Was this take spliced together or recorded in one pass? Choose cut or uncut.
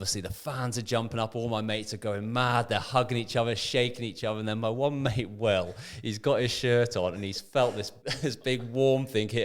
cut